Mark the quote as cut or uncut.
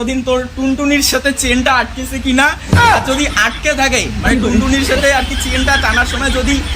uncut